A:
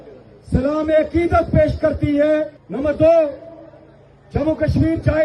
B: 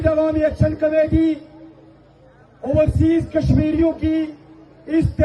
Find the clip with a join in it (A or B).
A